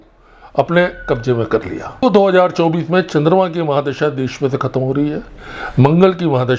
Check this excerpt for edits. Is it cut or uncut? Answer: cut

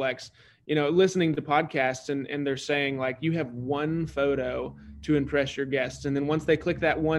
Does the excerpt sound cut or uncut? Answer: uncut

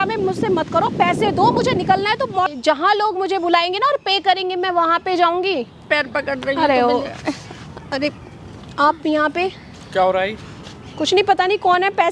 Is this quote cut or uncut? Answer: cut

